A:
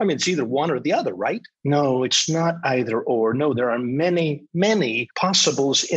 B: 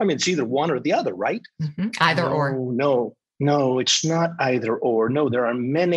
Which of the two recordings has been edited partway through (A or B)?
A